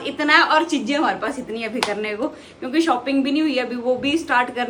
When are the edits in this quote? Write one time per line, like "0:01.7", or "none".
none